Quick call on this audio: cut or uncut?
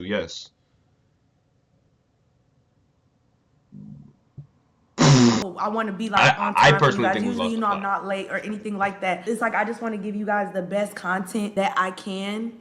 cut